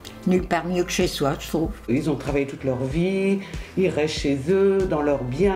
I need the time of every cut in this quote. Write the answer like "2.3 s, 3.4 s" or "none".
1.9 s